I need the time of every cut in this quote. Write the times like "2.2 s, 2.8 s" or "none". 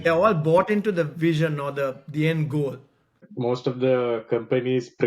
3.2 s